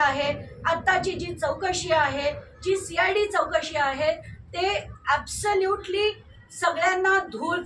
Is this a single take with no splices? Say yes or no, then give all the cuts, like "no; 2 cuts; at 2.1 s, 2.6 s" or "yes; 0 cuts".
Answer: yes; 0 cuts